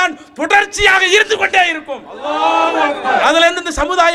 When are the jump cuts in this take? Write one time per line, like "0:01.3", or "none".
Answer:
none